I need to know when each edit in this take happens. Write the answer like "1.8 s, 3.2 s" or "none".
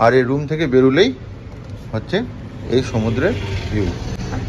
none